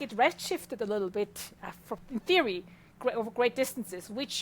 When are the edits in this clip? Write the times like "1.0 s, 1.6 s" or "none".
2.0 s